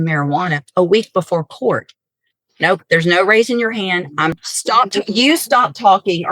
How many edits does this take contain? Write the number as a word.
one